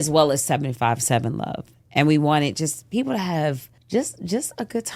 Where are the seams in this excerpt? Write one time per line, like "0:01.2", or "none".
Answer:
0:03.7